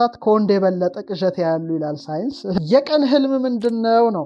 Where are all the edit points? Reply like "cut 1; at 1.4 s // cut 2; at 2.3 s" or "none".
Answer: cut 1; at 2.6 s